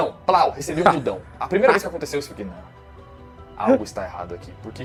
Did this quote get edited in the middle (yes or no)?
no